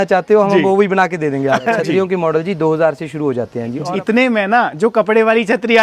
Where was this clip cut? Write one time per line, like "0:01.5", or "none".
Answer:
0:01.7
0:03.8